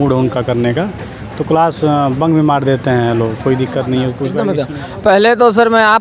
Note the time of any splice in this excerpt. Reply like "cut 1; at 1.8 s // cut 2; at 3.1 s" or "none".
cut 1; at 4.3 s